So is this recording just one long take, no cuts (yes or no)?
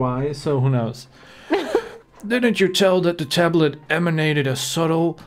yes